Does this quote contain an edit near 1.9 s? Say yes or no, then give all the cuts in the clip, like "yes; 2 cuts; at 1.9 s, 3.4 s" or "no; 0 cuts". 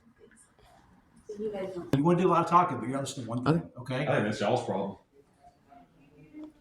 yes; 1 cut; at 1.9 s